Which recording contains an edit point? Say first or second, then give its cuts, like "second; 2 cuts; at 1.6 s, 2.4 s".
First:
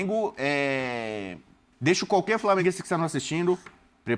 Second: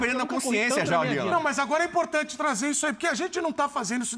first; 1 cut; at 1.6 s